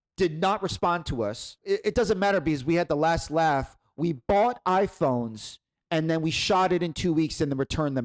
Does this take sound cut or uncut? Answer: uncut